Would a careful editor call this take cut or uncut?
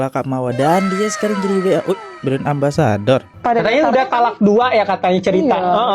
cut